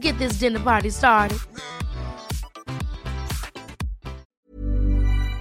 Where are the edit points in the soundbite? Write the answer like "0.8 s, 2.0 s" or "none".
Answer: 4.3 s